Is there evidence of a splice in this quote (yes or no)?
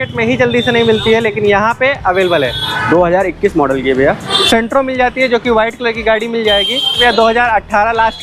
yes